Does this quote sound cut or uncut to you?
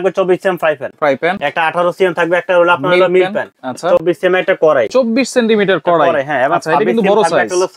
uncut